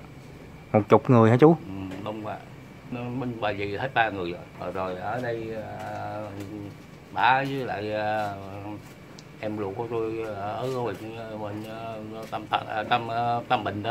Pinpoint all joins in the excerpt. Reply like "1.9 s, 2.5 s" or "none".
2.9 s, 4.5 s